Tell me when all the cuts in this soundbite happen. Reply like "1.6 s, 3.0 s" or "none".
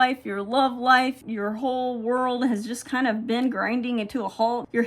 1.2 s